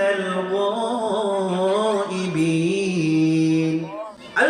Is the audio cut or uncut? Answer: uncut